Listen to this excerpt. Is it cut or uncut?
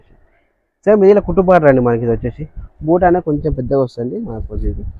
uncut